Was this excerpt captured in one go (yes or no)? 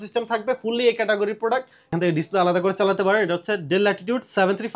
no